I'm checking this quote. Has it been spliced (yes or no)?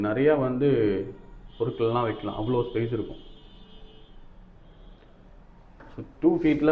no